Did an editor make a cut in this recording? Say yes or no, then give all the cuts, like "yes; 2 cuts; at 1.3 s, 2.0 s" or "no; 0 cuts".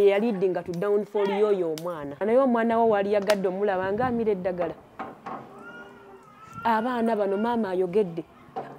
yes; 1 cut; at 2.2 s